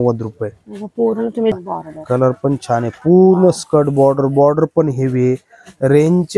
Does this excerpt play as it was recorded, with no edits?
no; 1 cut; at 1.5 s

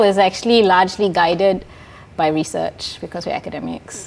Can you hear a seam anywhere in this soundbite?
no; 0 cuts

